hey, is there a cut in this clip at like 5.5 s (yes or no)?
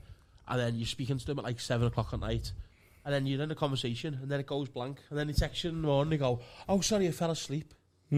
no